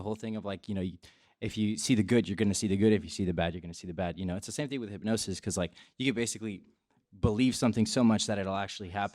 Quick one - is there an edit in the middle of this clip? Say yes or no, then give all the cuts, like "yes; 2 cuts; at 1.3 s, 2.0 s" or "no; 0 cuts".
no; 0 cuts